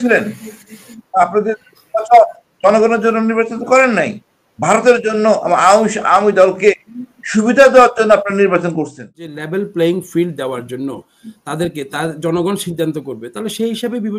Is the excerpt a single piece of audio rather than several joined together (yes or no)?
no